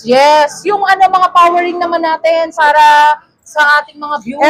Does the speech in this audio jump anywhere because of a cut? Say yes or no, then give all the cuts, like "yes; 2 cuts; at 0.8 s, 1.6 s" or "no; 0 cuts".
no; 0 cuts